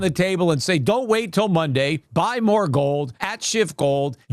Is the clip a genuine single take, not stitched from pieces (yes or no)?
no